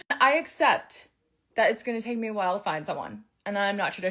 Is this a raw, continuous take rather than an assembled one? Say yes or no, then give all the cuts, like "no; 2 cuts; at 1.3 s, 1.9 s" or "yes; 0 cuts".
yes; 0 cuts